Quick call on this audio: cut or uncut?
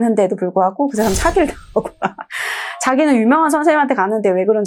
uncut